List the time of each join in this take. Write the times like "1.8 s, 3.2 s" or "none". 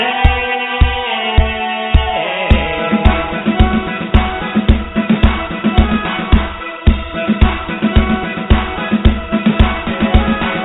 7.4 s